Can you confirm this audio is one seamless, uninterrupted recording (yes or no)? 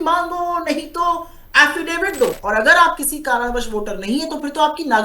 no